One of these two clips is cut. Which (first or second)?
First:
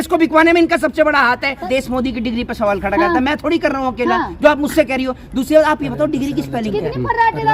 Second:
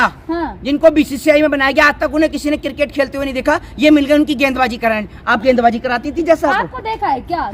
first